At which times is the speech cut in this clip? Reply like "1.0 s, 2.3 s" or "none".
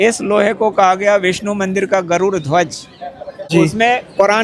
3.4 s